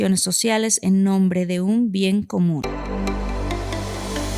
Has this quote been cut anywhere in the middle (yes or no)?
yes